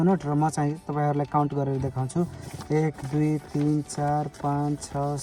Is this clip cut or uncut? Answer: uncut